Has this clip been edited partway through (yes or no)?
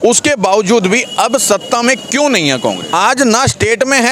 yes